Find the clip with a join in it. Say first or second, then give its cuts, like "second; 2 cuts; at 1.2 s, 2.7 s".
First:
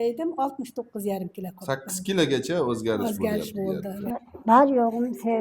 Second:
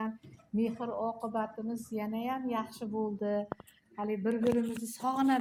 first; 1 cut; at 3.9 s